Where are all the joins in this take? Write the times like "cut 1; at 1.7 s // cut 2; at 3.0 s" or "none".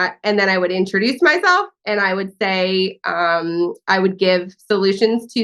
none

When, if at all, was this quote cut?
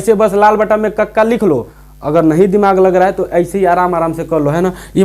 cut 1; at 1.8 s

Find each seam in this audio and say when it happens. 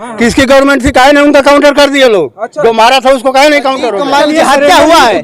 cut 1; at 4.0 s

